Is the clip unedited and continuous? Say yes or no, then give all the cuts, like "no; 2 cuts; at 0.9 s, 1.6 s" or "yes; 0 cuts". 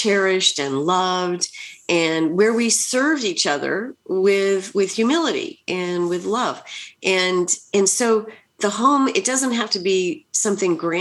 yes; 0 cuts